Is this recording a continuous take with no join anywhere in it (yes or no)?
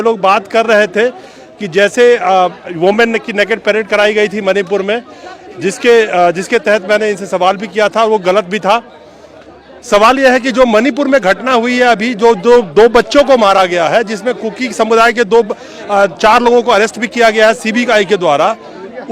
yes